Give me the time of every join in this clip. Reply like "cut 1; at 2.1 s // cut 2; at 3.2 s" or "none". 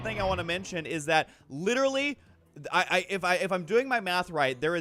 cut 1; at 2.3 s